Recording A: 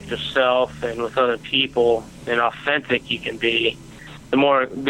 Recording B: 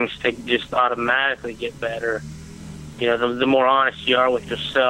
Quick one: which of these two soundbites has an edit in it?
B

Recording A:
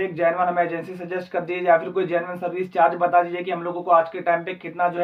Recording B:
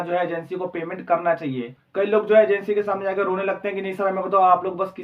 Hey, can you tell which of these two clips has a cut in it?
B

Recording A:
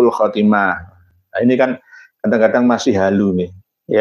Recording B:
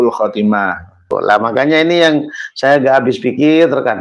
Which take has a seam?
B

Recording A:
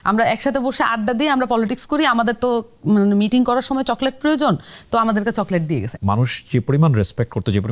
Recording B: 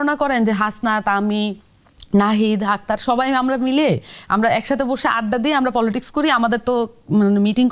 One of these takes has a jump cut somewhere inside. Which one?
A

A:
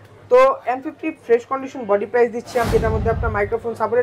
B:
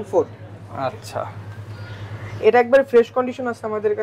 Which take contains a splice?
A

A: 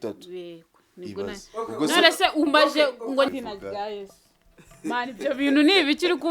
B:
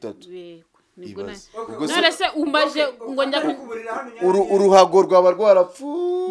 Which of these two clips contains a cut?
A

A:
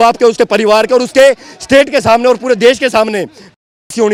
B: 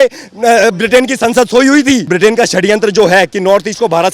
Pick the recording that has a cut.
B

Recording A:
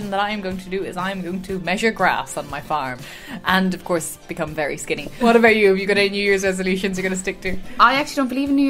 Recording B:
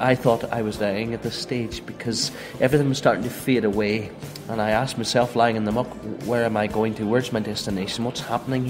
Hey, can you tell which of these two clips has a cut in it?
A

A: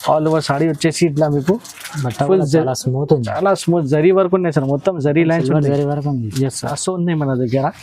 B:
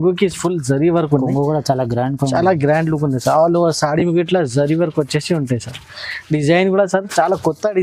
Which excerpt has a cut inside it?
A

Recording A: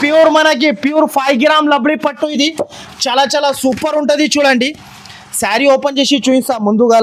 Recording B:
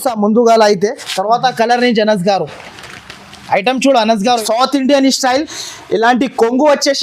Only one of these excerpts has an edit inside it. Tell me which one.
B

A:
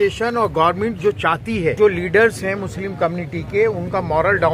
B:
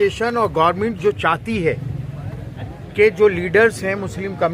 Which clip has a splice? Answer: A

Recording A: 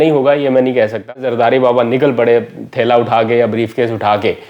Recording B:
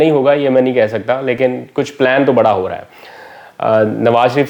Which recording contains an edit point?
A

